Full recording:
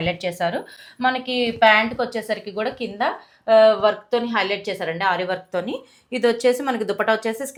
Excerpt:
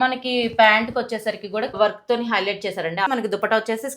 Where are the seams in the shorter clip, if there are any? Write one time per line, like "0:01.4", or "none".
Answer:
0:01.7
0:03.1